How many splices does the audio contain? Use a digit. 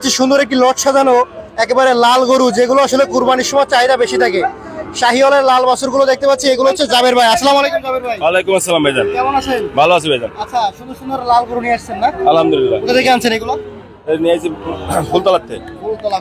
0